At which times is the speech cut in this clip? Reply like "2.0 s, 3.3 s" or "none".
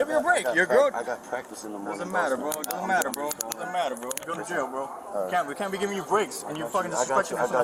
none